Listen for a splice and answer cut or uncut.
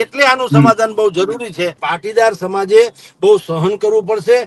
cut